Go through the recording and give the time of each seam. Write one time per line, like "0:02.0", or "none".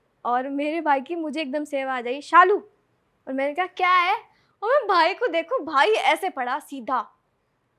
none